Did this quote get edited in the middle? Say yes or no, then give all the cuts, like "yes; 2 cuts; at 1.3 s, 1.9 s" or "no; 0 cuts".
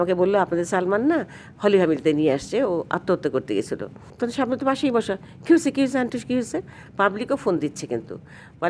yes; 2 cuts; at 4.0 s, 6.8 s